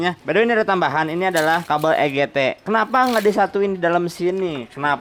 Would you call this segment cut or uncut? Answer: uncut